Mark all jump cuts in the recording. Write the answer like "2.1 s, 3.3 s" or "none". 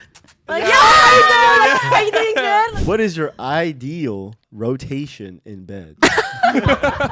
2.7 s